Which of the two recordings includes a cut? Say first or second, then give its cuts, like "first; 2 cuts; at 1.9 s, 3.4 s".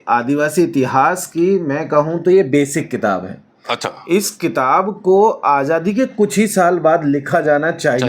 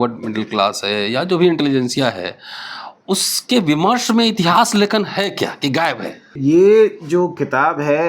second; 1 cut; at 6.4 s